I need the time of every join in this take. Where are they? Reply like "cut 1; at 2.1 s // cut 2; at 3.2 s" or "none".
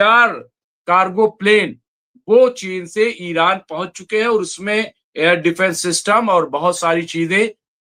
none